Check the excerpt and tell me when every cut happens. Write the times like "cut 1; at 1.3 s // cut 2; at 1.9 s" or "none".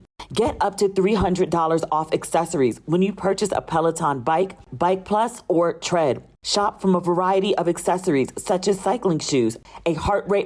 none